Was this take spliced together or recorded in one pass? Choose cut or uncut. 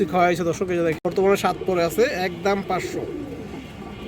cut